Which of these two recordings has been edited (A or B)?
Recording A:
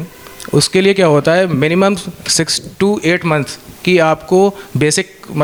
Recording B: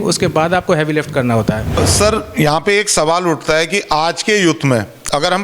B